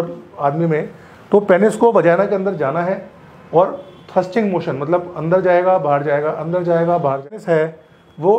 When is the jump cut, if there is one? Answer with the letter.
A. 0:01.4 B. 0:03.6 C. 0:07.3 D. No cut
C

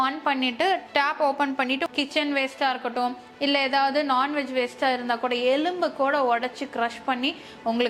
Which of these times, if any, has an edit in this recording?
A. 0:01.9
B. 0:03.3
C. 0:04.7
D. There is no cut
A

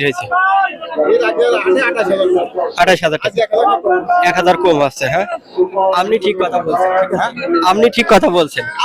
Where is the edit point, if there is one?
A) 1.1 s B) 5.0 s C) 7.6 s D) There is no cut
D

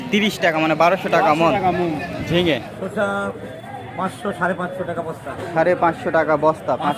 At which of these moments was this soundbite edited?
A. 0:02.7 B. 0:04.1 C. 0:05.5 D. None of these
A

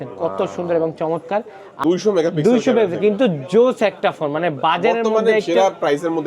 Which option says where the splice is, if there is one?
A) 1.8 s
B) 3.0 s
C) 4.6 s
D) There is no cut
A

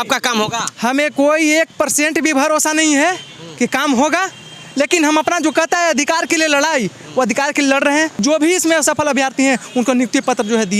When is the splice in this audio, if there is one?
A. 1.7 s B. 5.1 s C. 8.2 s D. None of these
C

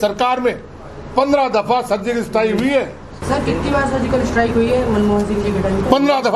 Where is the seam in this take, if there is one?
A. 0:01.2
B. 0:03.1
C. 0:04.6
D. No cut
B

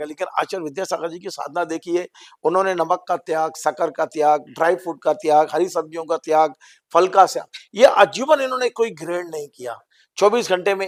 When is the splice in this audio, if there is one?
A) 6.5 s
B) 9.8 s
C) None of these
C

